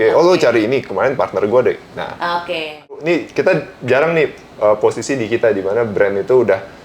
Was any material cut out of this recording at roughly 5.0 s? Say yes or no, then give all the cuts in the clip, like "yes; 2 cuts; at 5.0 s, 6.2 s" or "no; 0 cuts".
no; 1 cut; at 2.9 s